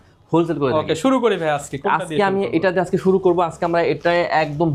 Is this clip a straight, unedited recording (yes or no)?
yes